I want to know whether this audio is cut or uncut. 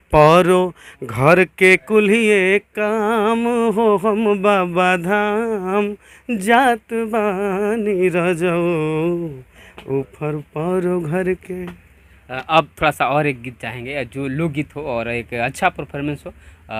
uncut